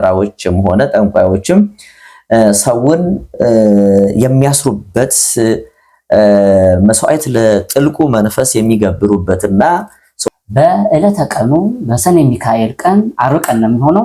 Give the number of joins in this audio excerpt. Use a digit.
1